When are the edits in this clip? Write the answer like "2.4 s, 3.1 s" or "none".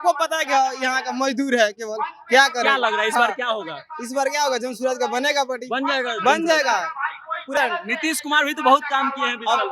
7.5 s